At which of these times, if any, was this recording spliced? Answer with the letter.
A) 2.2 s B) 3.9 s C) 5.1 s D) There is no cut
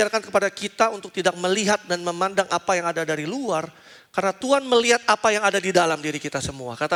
D